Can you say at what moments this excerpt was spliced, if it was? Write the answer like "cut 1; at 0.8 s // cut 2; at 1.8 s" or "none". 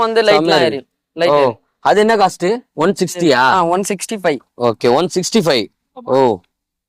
none